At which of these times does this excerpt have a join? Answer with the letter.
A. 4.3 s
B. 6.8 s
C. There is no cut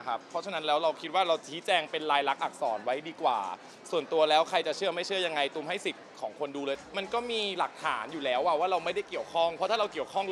B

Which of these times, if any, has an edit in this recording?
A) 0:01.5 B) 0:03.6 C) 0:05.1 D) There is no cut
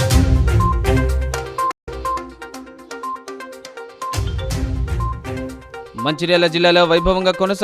A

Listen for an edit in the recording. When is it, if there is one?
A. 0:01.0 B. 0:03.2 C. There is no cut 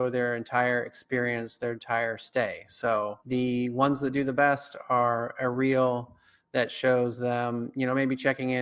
B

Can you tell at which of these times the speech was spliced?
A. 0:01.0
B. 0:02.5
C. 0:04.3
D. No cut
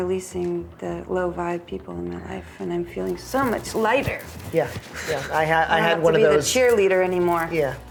D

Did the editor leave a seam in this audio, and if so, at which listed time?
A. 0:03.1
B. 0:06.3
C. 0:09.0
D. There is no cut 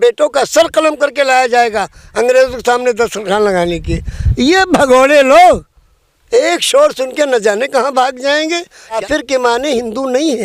C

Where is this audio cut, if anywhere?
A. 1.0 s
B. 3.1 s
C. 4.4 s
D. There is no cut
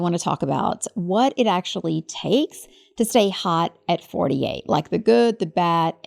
D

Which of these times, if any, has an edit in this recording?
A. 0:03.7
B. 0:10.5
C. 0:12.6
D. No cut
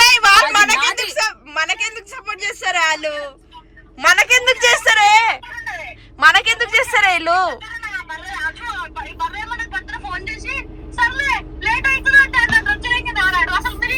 D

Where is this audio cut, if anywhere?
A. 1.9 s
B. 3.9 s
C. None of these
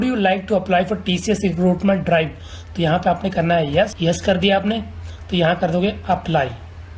B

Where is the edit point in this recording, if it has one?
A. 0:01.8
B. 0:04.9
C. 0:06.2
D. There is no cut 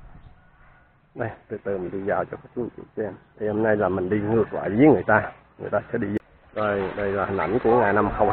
C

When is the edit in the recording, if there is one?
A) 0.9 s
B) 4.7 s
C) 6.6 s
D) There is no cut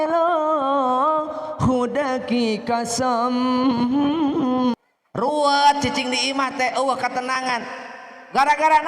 B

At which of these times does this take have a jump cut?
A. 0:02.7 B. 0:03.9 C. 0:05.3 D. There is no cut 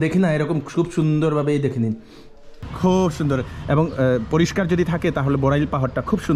A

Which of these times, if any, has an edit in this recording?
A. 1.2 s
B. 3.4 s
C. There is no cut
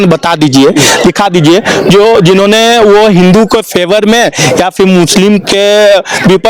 C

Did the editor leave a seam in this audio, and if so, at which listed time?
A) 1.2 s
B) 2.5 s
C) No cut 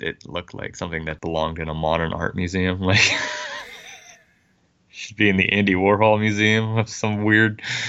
A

